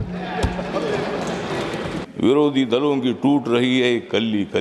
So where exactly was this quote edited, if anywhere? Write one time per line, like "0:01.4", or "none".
0:02.0